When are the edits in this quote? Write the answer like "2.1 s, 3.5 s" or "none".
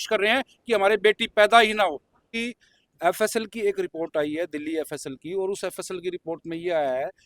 2.3 s